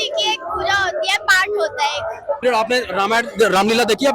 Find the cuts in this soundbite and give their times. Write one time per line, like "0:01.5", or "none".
0:02.4